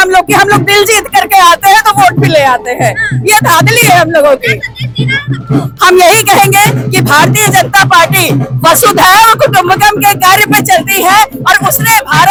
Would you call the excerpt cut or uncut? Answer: uncut